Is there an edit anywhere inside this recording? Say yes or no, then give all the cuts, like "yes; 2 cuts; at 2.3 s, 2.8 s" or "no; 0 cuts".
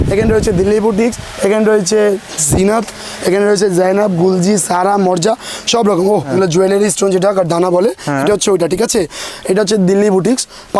yes; 2 cuts; at 6.3 s, 9.3 s